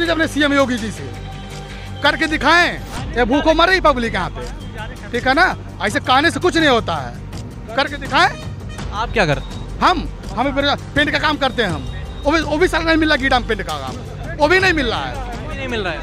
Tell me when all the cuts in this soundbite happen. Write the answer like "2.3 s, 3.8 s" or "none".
none